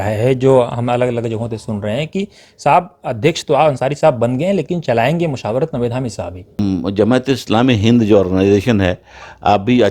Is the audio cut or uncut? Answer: cut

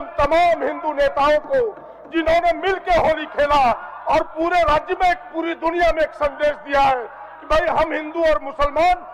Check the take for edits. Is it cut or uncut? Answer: uncut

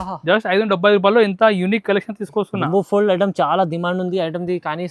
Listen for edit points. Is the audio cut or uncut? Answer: uncut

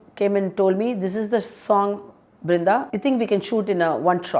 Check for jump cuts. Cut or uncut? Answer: cut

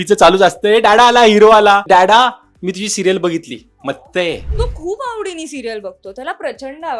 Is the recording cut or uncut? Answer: cut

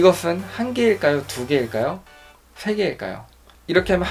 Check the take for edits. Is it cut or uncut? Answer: uncut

